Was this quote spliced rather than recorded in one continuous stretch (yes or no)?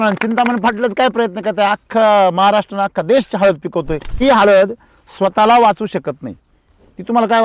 yes